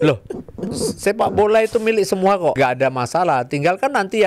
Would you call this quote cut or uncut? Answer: cut